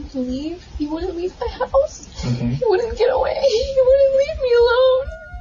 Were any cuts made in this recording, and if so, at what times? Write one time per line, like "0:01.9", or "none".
none